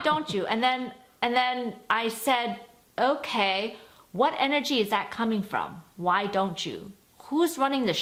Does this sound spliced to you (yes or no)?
no